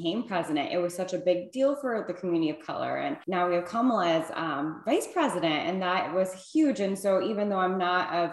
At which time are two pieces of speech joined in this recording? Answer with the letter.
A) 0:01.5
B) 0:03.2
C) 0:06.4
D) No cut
B